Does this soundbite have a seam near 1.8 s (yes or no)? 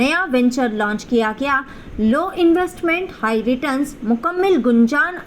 no